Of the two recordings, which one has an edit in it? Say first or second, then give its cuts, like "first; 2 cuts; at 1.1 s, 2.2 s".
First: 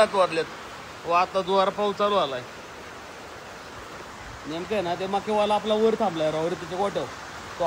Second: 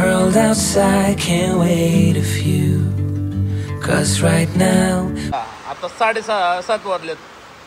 second; 1 cut; at 5.3 s